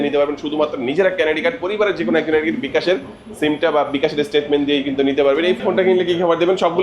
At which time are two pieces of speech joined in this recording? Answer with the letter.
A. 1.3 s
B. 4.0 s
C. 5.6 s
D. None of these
C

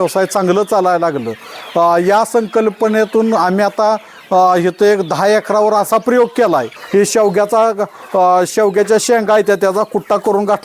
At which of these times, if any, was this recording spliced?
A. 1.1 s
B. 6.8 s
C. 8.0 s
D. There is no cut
B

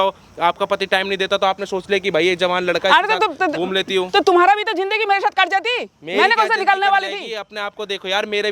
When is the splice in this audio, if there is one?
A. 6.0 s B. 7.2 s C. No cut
C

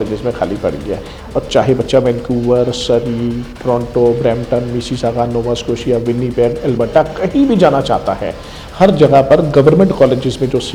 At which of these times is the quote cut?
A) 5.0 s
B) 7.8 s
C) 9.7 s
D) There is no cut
D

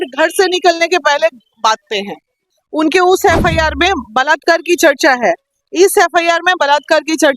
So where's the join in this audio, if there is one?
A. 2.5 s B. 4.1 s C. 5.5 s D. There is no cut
A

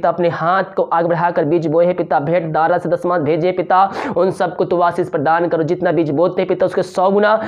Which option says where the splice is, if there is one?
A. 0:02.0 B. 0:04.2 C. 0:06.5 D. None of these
D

